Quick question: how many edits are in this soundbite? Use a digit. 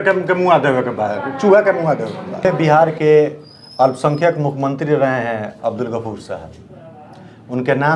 1